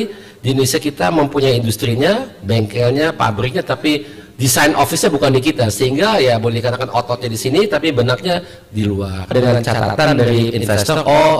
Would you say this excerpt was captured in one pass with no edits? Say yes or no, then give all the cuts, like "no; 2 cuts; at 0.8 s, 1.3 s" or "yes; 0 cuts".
no; 1 cut; at 9.3 s